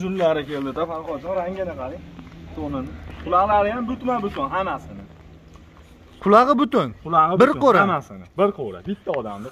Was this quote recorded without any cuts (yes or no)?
yes